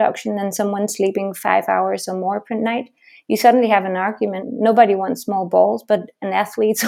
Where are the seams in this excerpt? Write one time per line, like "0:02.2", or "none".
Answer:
none